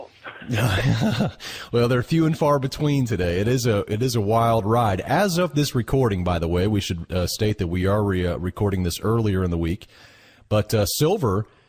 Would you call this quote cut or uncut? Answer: cut